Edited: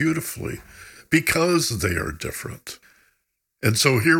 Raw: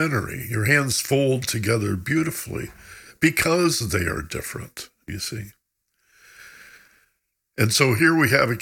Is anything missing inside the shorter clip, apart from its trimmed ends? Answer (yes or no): yes